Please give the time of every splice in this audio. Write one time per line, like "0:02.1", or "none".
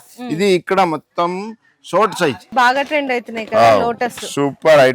0:02.5